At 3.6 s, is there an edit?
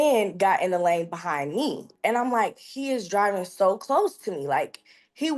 no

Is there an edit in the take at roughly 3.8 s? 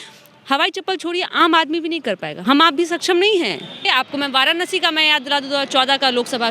yes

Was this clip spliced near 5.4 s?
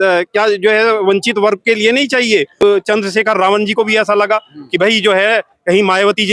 no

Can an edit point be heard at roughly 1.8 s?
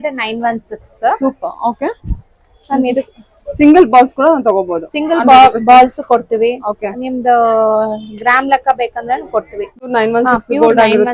no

